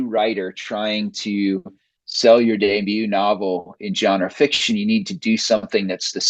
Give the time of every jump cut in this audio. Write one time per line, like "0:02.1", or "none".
none